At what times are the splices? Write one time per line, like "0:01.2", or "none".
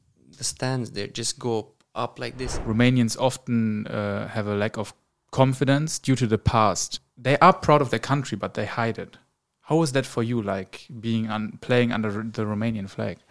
0:02.5
0:07.0